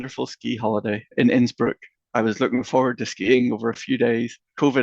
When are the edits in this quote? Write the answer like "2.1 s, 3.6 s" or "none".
1.1 s